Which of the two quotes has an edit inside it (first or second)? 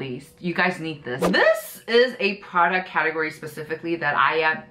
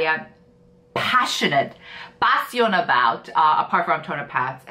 first